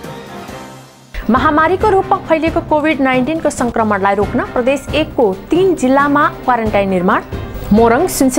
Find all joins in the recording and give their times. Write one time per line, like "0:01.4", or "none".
0:00.9

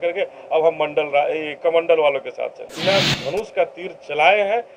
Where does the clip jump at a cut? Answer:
0:02.7

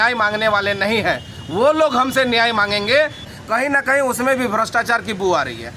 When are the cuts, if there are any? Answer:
0:03.2

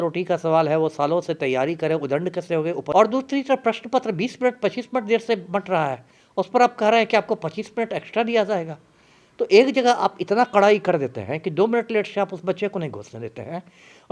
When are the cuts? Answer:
0:02.9

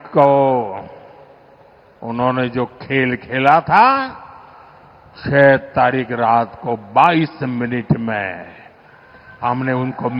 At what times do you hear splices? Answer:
none

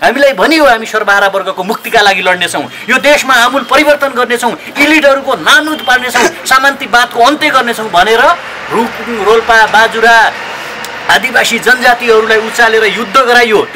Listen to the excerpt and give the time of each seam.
none

